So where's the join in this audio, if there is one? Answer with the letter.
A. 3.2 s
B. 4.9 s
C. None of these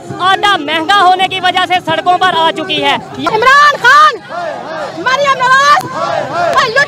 C